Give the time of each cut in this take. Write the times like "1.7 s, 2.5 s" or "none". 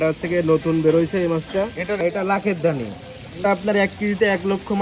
2.0 s, 3.4 s